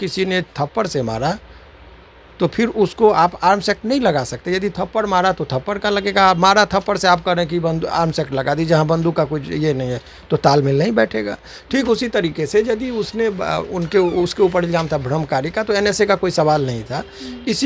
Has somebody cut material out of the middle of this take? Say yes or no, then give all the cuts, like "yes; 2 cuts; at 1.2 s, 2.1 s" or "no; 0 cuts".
no; 0 cuts